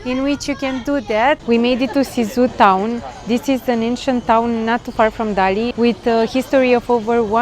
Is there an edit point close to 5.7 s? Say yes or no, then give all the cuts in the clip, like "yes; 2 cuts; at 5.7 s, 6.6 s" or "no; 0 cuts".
yes; 2 cuts; at 1.4 s, 5.7 s